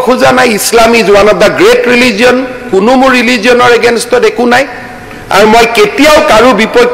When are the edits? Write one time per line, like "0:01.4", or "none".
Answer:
none

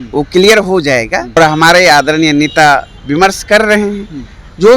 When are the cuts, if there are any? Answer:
0:01.4

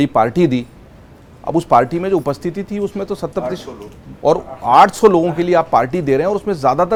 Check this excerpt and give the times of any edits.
none

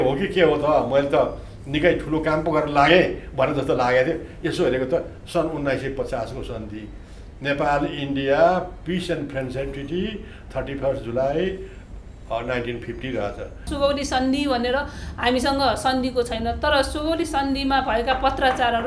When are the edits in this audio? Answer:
0:13.7

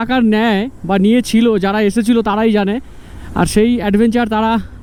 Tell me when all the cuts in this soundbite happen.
none

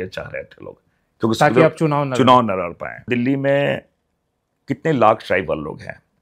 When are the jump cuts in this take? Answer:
0:03.1

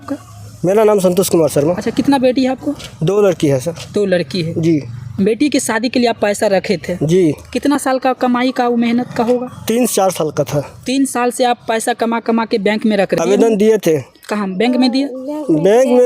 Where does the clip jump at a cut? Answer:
0:13.1

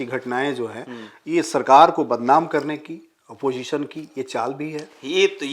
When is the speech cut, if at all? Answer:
none

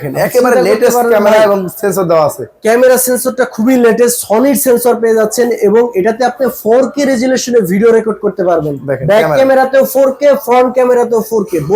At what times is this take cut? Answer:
none

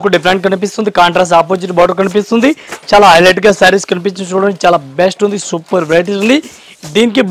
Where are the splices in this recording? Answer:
none

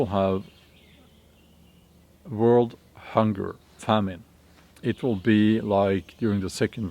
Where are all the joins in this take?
0:03.7
0:04.6

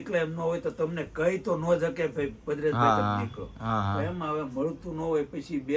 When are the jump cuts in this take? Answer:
none

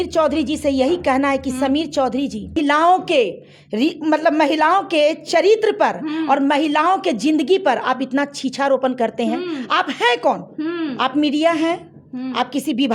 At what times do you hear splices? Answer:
0:02.6

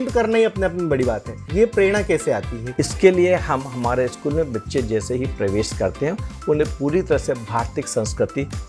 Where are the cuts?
0:01.4
0:02.6

